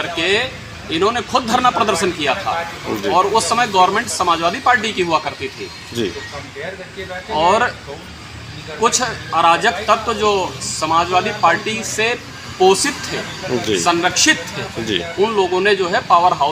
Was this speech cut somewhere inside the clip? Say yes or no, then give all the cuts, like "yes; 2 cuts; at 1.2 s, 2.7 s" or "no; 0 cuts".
no; 0 cuts